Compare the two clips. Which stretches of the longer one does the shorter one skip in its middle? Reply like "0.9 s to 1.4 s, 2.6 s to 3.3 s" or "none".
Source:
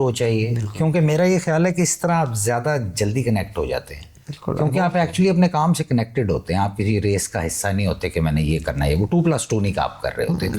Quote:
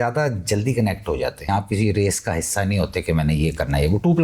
4.0 s to 6.6 s